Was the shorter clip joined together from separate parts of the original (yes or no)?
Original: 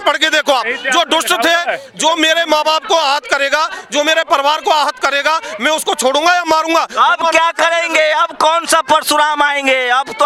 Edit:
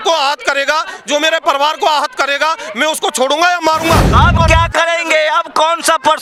no